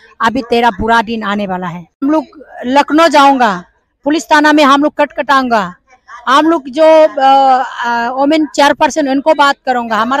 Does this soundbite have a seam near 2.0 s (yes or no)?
yes